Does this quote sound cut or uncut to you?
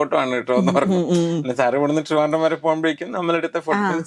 uncut